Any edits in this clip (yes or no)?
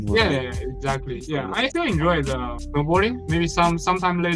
yes